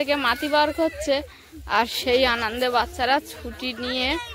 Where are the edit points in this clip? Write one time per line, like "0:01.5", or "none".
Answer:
none